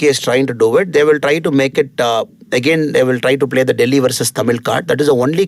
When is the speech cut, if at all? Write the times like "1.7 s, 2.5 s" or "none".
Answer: none